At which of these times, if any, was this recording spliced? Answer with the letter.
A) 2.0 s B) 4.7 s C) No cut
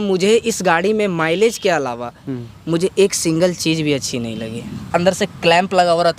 B